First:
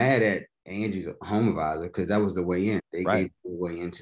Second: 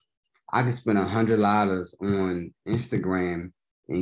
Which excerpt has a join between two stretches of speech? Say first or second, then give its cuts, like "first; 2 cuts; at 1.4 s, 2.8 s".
first; 1 cut; at 2.9 s